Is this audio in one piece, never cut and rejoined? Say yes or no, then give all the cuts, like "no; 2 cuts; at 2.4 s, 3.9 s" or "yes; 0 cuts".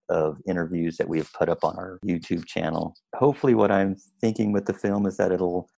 no; 2 cuts; at 2.0 s, 3.1 s